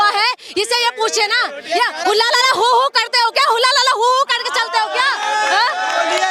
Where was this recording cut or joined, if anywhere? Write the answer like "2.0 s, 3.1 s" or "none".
none